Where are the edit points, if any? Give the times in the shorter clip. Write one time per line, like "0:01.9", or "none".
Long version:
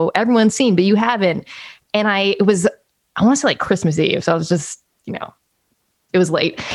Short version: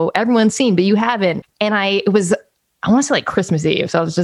0:01.5